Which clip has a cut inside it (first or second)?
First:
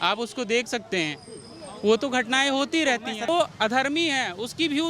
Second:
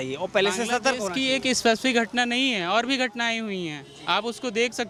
first